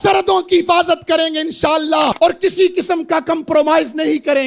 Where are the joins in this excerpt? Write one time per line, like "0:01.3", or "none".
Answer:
0:02.1